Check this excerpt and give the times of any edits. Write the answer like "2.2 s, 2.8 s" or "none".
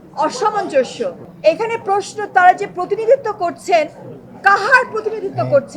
1.2 s